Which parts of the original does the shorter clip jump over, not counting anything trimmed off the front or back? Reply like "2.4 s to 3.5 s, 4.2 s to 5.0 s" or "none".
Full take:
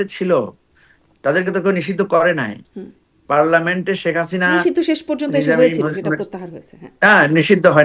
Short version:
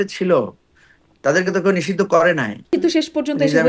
2.7 s to 4.6 s